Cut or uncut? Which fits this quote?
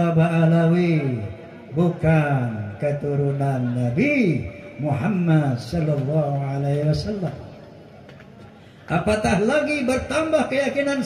uncut